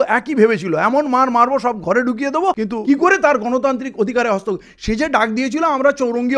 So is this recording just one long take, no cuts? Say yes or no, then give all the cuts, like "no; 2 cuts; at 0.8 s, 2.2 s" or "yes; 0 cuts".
no; 1 cut; at 2.7 s